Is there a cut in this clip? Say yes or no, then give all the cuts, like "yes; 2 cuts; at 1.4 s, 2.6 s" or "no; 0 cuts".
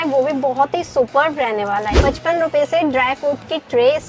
yes; 1 cut; at 1.9 s